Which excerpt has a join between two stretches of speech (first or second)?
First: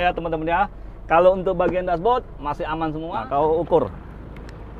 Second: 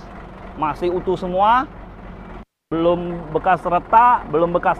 first